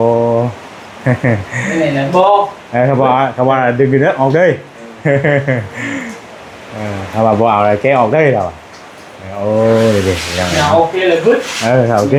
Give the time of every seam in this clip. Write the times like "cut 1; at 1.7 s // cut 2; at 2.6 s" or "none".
none